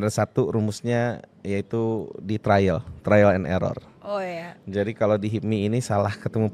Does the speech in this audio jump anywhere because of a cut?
no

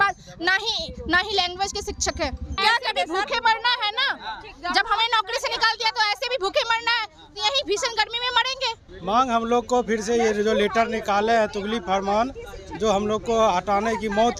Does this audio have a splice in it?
yes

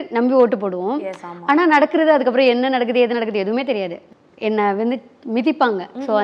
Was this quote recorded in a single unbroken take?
no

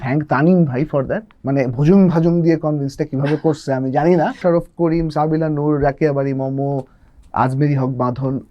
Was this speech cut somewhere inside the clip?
yes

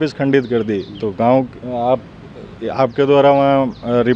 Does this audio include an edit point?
no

